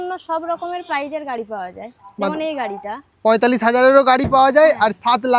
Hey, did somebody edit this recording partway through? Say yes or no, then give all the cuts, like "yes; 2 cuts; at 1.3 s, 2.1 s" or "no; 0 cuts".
no; 0 cuts